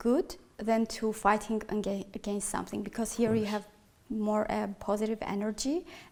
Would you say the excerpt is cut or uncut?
uncut